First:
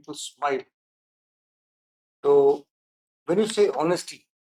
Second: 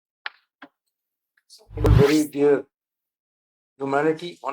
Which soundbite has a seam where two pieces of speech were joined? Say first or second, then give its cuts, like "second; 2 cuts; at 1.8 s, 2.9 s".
second; 1 cut; at 1.9 s